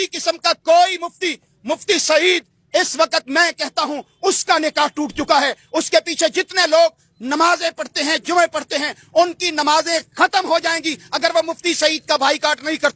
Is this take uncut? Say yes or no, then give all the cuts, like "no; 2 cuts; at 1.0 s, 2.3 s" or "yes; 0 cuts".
yes; 0 cuts